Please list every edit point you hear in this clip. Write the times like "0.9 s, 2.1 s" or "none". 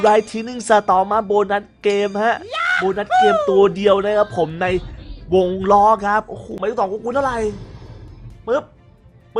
6.4 s